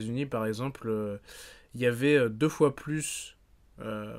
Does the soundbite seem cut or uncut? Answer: uncut